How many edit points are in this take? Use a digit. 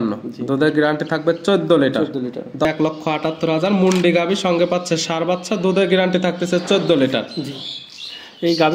1